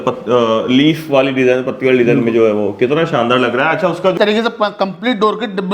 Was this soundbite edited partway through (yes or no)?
yes